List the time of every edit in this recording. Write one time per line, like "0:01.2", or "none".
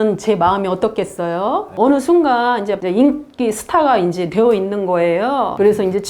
0:01.7
0:02.8